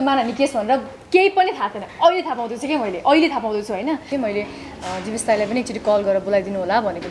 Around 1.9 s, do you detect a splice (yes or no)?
no